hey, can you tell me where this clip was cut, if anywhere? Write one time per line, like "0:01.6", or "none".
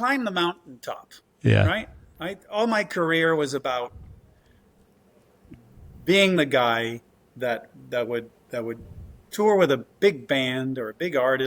none